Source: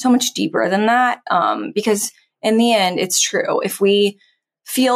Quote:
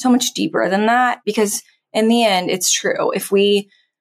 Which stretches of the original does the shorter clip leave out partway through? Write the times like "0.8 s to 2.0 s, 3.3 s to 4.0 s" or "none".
1.2 s to 1.7 s